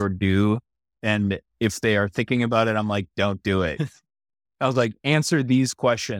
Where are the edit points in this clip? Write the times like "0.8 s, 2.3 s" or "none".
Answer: 1.0 s